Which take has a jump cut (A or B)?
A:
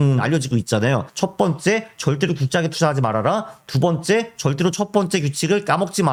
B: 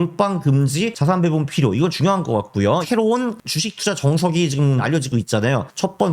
B